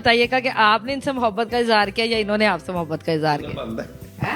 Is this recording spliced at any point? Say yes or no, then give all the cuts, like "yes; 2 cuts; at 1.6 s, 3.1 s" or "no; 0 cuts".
no; 0 cuts